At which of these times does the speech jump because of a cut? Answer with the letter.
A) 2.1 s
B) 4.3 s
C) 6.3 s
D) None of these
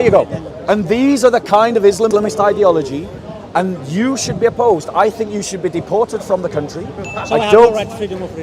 A